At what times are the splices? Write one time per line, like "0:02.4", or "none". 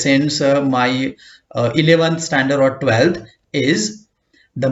none